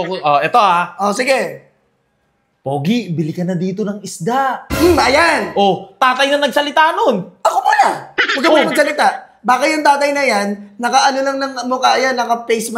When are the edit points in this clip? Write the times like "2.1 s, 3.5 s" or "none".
none